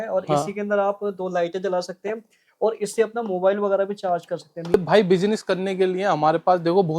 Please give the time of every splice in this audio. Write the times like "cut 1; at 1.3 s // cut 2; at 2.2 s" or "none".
cut 1; at 4.7 s